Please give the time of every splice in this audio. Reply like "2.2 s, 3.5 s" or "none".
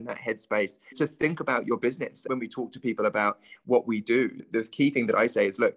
0.9 s, 2.2 s, 4.4 s